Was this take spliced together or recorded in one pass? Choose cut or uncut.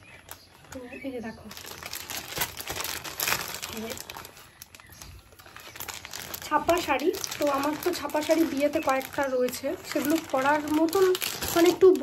uncut